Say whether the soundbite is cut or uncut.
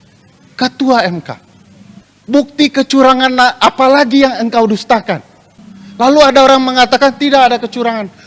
uncut